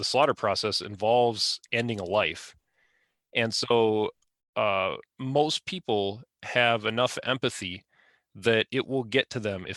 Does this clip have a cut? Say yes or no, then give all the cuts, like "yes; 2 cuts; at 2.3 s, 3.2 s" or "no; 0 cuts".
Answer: no; 0 cuts